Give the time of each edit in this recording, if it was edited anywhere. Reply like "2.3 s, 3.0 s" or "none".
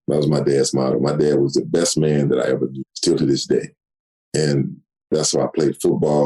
2.9 s, 5.1 s